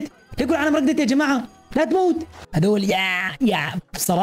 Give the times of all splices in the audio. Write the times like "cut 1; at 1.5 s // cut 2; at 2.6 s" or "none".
cut 1; at 2.4 s